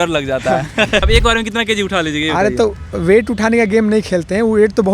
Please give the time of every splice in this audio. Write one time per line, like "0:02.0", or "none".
0:01.0

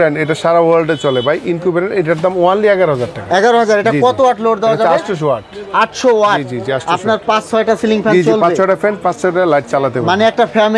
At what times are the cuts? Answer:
none

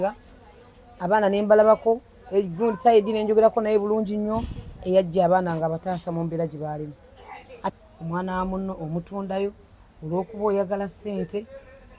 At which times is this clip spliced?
0:07.7

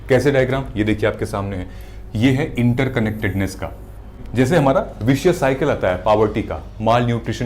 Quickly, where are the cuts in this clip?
0:04.2

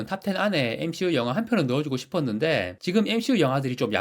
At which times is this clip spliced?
0:02.7

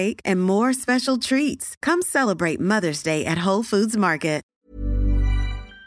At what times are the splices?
0:04.5

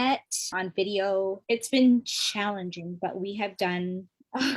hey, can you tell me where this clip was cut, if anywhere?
0:01.4

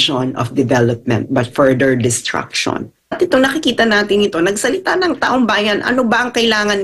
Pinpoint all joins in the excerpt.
0:03.0

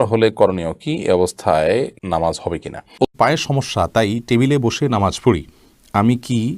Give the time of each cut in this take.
0:03.1

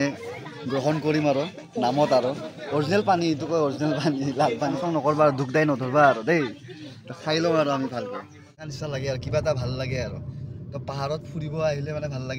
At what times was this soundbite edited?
0:04.8
0:08.3

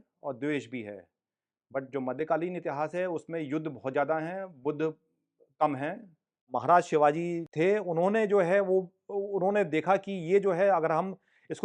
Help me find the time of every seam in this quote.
0:06.5

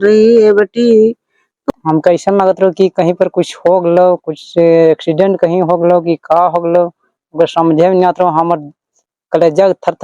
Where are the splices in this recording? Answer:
0:01.6

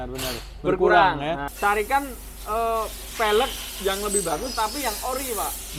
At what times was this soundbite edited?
0:01.5

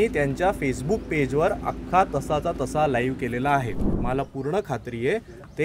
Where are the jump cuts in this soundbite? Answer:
0:03.9

